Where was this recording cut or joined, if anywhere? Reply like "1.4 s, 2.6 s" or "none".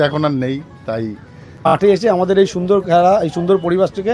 1.7 s